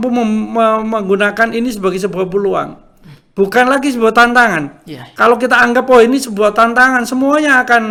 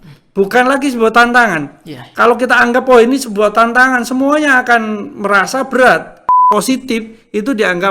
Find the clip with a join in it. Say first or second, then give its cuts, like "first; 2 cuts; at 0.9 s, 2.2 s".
second; 1 cut; at 6.3 s